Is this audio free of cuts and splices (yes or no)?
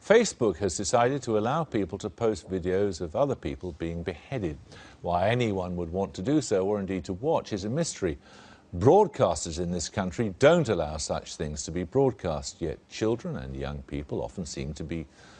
no